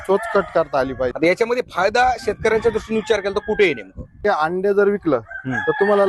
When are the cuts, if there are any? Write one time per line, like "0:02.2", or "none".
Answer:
0:01.1
0:04.2